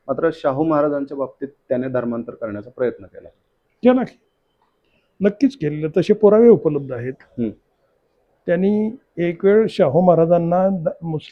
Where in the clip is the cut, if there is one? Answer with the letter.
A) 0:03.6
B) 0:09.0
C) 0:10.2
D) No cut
D